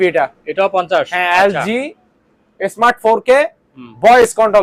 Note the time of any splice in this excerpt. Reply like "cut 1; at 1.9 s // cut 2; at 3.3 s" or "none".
none